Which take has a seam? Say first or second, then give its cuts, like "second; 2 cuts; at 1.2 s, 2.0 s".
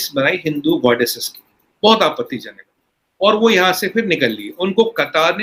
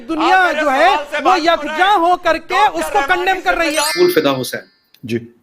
second; 1 cut; at 3.9 s